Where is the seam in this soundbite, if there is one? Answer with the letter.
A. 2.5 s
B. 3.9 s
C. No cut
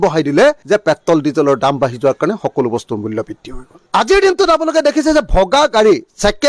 C